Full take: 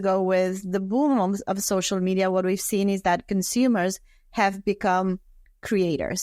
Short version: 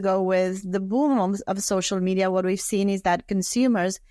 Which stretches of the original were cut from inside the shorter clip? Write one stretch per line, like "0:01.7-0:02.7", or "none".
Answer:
none